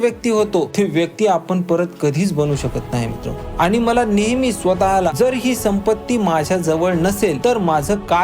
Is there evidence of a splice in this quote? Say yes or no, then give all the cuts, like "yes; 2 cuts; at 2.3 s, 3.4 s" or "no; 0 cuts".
yes; 4 cuts; at 1.1 s, 3.4 s, 5.1 s, 7.4 s